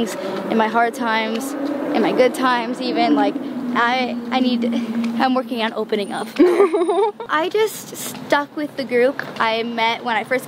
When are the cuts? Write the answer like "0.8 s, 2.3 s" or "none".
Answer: 7.3 s

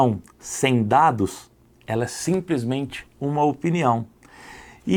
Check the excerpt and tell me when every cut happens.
none

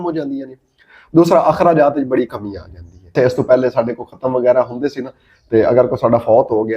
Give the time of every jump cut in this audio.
3.1 s

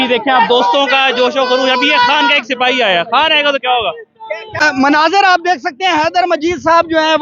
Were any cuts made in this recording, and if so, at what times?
4.6 s

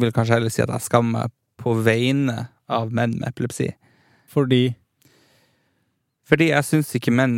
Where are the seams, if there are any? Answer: 4.2 s

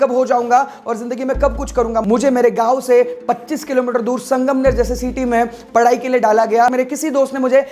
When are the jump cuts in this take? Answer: 2.0 s, 6.7 s

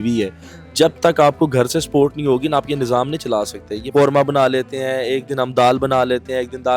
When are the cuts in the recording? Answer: 3.7 s

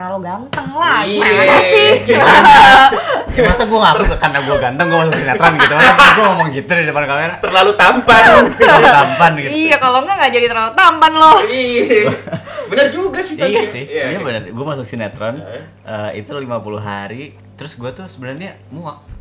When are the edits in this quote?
none

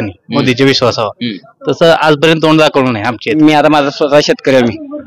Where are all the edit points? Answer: 3.4 s

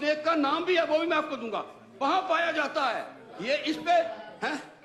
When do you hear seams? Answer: none

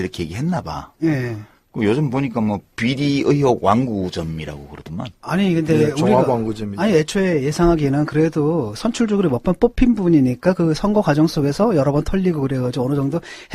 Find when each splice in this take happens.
1.9 s

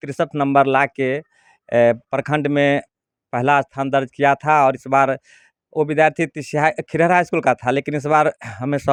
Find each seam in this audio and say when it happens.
none

